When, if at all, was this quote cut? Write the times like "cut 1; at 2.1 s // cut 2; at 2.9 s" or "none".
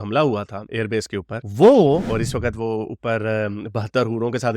cut 1; at 2.1 s